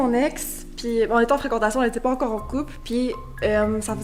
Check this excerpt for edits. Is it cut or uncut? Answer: uncut